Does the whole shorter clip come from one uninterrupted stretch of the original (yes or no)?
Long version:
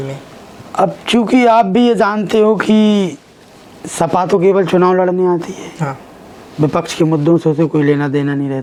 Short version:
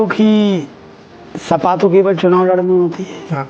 yes